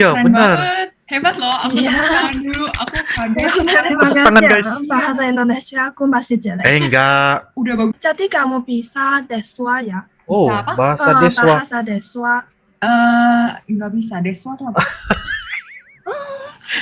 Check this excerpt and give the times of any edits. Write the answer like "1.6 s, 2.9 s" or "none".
7.9 s

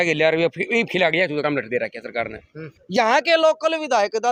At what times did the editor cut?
none

